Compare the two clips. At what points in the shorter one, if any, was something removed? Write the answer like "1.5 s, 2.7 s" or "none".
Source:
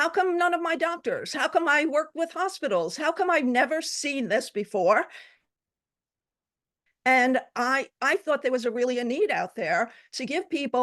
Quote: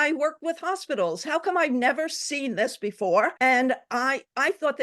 3.3 s